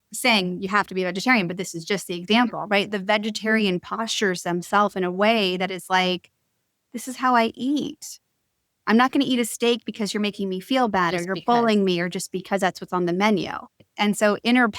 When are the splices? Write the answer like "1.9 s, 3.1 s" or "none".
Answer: 13.9 s